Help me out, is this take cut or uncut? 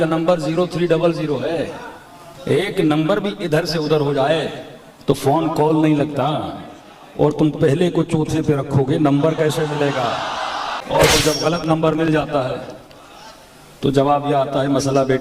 cut